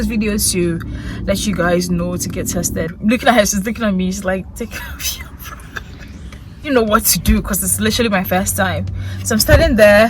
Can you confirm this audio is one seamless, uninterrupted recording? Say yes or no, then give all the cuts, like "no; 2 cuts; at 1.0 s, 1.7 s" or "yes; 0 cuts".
no; 2 cuts; at 2.9 s, 6.7 s